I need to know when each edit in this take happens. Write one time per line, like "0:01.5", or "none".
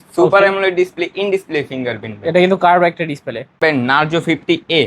0:03.6